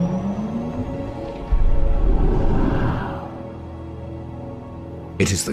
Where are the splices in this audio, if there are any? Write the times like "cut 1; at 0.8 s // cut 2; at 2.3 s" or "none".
cut 1; at 1.0 s